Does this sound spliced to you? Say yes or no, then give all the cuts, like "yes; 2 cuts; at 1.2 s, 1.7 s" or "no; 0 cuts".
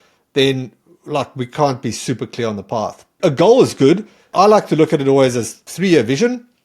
yes; 3 cuts; at 3.1 s, 4.3 s, 5.7 s